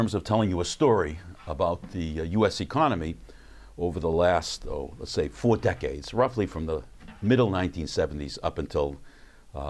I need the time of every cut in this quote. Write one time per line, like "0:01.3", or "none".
0:06.7